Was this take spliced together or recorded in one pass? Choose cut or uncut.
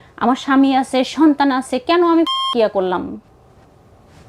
cut